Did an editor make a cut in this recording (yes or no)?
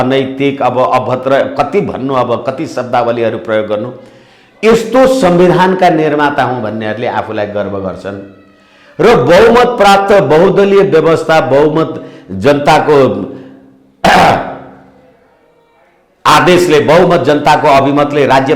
no